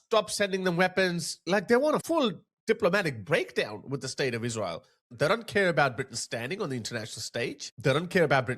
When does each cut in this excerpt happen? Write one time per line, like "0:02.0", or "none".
0:01.5
0:05.0